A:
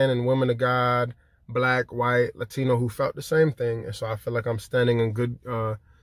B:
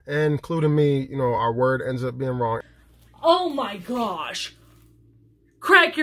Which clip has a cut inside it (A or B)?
B